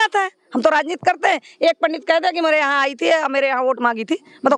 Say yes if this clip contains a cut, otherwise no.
no